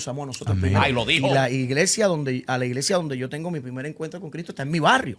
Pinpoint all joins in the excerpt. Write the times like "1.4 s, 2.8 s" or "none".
1.2 s